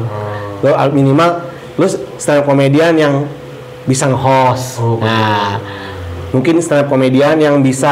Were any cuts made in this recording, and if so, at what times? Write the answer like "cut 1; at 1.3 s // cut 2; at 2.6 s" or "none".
none